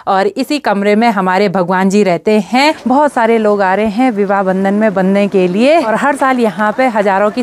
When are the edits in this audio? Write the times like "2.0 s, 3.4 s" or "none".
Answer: 2.8 s, 5.9 s